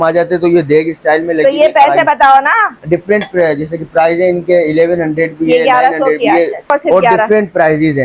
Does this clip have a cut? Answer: yes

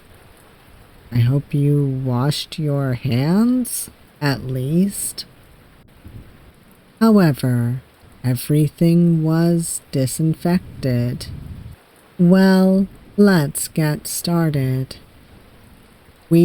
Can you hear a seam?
no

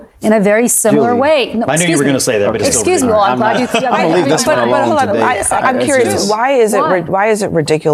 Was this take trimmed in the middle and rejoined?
no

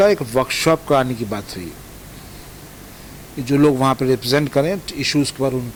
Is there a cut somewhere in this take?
no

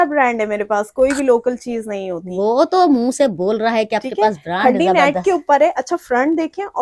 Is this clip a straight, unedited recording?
yes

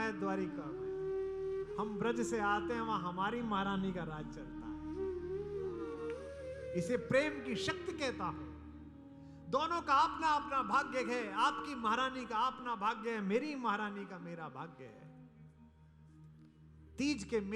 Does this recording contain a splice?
yes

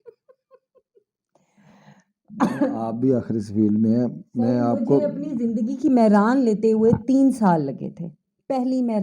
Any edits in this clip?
no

